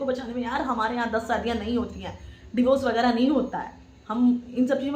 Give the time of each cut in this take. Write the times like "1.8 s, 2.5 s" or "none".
none